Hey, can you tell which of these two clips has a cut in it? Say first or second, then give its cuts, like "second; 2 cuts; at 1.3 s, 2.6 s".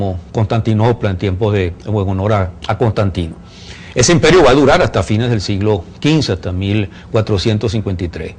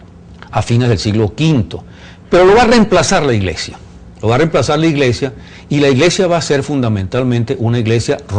first; 1 cut; at 2.9 s